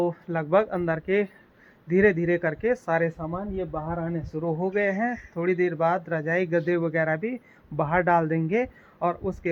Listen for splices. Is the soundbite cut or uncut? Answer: uncut